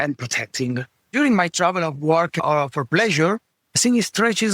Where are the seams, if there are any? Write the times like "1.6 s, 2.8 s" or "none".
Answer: 1.1 s